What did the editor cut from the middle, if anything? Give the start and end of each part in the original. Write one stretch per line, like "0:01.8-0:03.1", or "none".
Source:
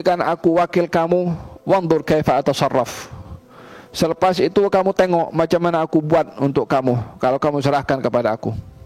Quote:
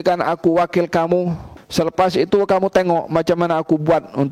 0:01.5-0:03.7